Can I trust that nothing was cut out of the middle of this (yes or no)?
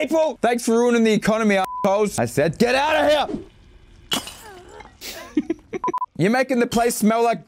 yes